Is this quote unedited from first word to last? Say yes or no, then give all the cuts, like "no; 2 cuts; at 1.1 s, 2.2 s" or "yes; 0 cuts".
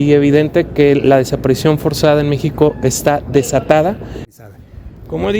no; 1 cut; at 4.3 s